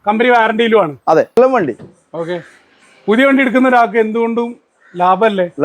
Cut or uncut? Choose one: cut